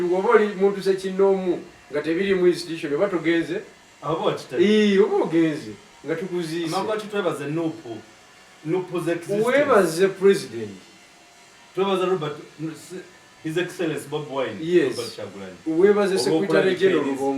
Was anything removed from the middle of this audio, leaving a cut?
no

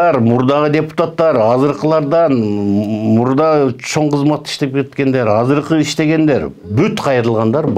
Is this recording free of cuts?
yes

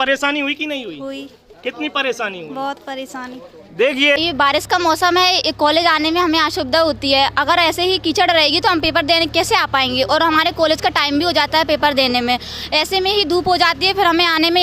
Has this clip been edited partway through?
yes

